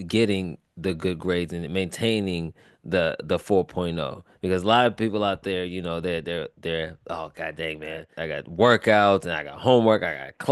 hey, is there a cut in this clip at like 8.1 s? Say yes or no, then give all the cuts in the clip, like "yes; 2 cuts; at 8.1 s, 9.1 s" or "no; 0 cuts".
yes; 1 cut; at 8.1 s